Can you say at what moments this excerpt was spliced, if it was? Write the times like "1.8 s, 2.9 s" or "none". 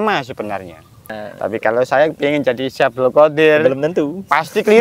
1.2 s